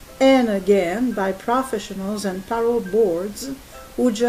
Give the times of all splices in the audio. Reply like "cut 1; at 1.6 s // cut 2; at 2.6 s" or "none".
none